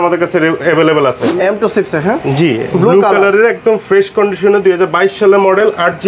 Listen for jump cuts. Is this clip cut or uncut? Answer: cut